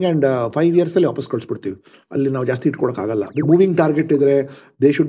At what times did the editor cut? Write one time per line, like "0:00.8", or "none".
0:03.4